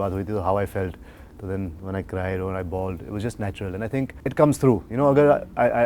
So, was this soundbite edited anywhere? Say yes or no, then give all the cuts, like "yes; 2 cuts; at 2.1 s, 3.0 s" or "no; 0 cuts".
no; 0 cuts